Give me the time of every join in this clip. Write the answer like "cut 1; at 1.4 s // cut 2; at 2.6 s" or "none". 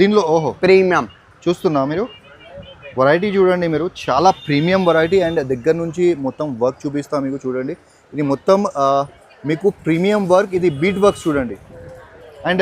none